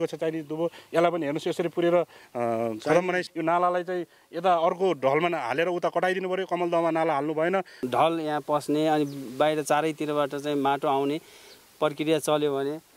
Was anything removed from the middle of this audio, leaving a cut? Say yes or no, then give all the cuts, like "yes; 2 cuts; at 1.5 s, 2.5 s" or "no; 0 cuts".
yes; 2 cuts; at 3.3 s, 7.9 s